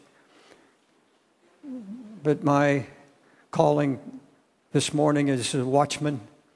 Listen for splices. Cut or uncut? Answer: uncut